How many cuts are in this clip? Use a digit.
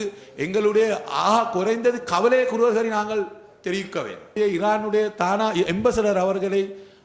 1